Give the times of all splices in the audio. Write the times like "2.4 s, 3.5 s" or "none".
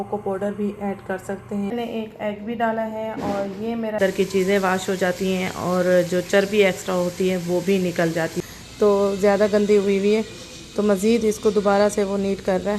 1.7 s, 4.0 s, 8.4 s